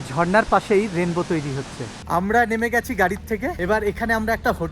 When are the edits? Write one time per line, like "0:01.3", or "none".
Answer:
0:01.9
0:03.6